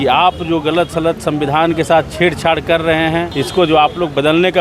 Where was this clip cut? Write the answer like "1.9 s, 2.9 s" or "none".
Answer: 3.3 s